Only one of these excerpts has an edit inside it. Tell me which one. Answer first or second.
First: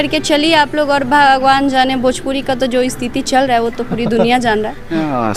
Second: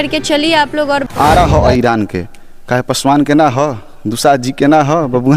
second